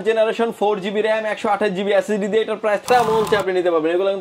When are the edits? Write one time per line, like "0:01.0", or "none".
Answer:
0:02.8